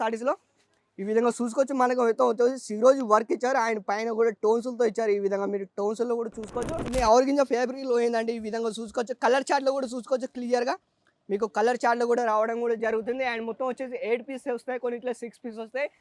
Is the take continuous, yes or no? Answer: no